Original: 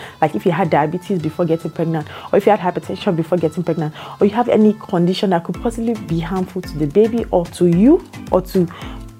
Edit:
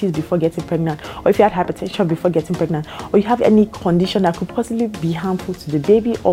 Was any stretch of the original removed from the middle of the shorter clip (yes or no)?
no